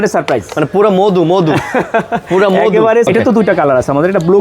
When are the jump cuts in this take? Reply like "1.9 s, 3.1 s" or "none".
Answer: 3.1 s

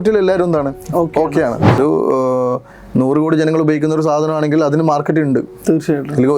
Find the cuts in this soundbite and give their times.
1.8 s

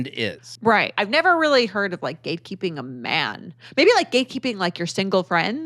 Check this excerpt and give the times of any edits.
0.9 s

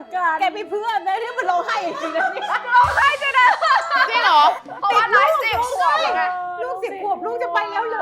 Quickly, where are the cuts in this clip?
none

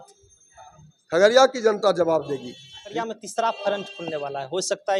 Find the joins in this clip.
2.9 s

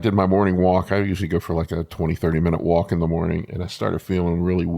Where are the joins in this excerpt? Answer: none

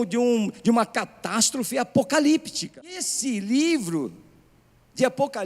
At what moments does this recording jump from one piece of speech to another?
3.0 s

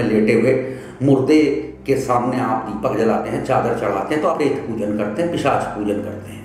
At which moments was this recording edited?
1.7 s, 3.2 s, 4.4 s

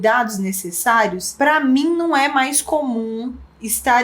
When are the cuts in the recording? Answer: 1.2 s

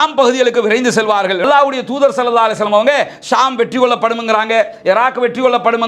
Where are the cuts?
1.4 s

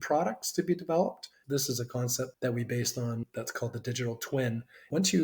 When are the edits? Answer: 1.4 s, 2.3 s

